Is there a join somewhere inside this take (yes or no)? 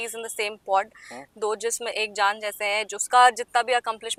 no